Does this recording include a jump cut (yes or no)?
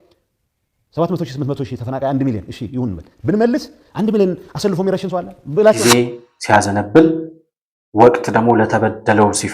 yes